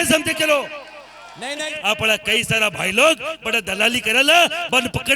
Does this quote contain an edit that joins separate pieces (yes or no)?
yes